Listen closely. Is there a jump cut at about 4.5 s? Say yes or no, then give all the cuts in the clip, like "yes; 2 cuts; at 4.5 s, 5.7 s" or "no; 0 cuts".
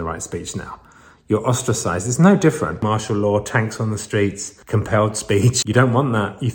yes; 3 cuts; at 2.8 s, 4.5 s, 5.6 s